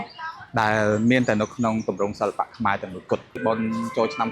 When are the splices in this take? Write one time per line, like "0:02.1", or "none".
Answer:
0:03.4

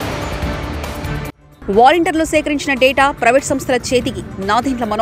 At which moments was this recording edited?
0:01.4

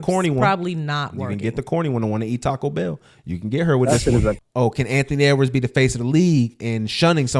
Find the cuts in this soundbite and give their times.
0:04.4

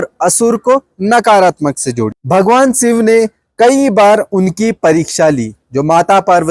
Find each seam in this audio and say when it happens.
0:02.1

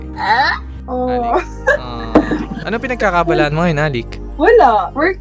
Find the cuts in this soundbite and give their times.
none

